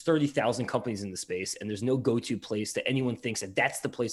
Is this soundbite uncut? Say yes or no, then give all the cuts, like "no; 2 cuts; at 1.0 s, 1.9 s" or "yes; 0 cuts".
yes; 0 cuts